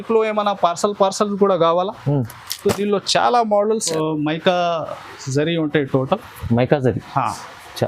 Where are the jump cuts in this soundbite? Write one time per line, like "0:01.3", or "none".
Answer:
0:03.9